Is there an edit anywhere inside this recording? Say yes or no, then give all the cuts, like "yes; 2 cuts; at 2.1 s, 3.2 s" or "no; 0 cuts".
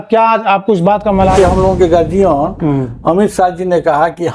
yes; 1 cut; at 1.3 s